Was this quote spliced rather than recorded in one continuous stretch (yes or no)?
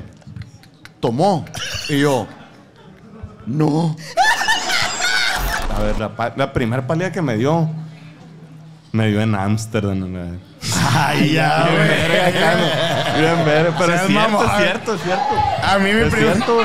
yes